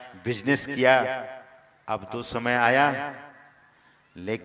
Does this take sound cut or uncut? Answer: uncut